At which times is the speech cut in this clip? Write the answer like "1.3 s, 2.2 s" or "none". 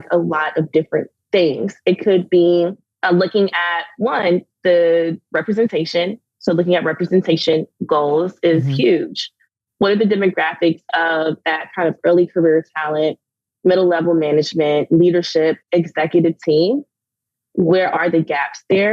1.2 s, 2.9 s